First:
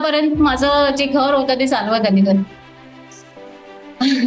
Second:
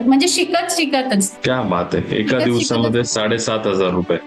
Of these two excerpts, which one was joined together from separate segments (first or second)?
second